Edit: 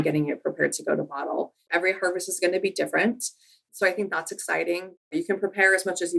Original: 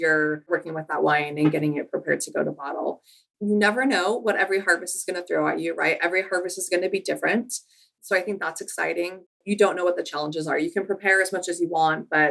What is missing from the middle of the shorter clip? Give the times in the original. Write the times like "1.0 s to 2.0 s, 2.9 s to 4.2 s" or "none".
3.2 s to 6.0 s, 9.4 s to 10.6 s